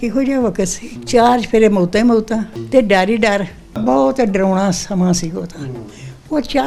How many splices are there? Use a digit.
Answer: 1